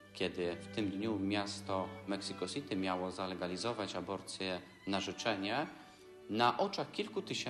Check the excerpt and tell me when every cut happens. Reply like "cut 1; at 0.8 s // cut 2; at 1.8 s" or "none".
cut 1; at 2.1 s